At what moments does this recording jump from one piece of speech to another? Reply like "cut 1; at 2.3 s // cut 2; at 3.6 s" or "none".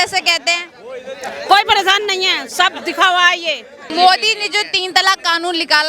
cut 1; at 3.8 s